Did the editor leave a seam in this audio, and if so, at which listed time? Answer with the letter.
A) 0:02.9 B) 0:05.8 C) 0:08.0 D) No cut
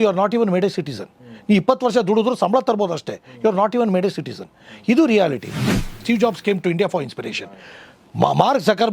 B